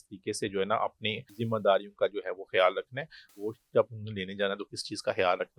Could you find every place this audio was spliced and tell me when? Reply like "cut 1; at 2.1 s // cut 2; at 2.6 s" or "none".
cut 1; at 1.3 s // cut 2; at 3.3 s